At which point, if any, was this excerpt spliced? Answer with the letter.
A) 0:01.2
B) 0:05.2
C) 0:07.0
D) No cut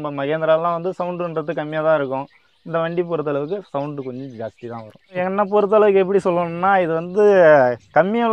B